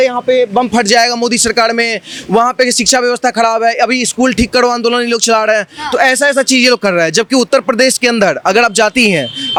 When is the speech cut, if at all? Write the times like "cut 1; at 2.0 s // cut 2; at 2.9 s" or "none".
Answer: none